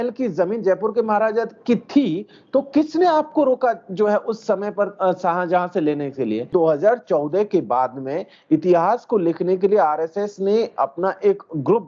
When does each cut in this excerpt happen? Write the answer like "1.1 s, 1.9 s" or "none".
6.5 s